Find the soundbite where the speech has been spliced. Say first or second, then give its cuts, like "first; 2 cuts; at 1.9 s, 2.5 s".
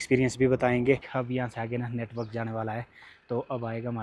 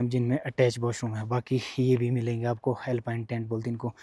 first; 1 cut; at 1.1 s